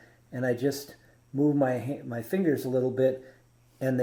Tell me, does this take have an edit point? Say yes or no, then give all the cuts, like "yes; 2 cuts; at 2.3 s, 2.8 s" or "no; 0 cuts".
no; 0 cuts